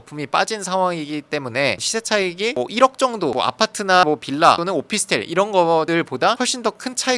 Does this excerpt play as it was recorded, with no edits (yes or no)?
no